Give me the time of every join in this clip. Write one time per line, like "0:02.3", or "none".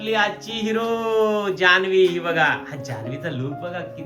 none